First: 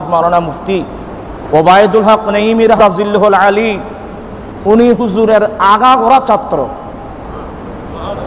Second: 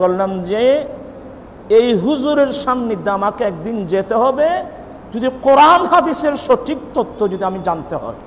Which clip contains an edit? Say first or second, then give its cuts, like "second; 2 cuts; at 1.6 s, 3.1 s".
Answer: first; 1 cut; at 2.8 s